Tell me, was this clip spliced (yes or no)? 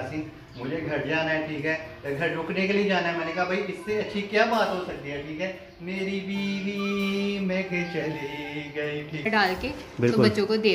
yes